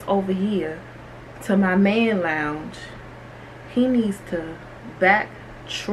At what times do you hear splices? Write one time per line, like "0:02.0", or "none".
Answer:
none